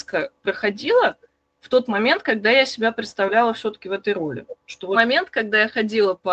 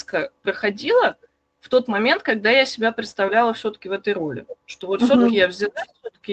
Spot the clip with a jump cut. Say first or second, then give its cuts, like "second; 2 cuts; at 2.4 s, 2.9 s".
first; 1 cut; at 5.0 s